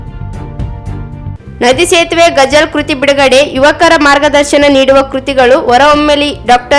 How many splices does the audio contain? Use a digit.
0